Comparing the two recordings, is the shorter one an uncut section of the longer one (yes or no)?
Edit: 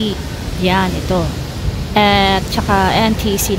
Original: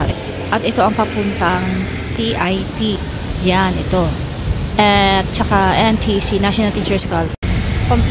yes